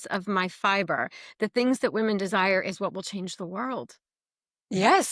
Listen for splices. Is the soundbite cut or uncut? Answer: uncut